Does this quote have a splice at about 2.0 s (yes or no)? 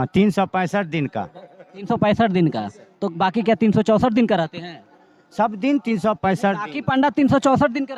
no